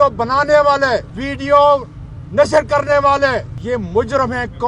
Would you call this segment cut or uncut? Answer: cut